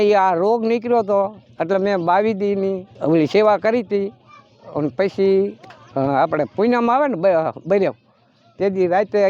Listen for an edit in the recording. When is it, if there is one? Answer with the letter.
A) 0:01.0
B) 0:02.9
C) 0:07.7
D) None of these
B